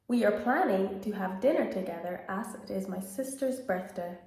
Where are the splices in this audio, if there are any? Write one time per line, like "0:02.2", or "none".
none